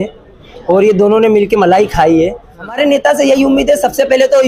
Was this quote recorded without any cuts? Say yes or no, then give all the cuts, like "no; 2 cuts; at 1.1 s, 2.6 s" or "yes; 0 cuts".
no; 1 cut; at 2.8 s